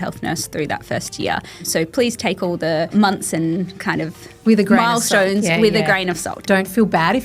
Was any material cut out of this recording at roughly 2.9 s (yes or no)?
yes